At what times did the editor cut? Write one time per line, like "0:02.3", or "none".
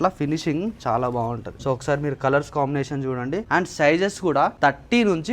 0:01.5
0:03.5
0:04.5